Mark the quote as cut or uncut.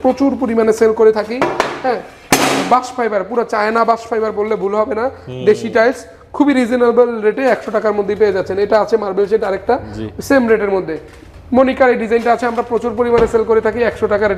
uncut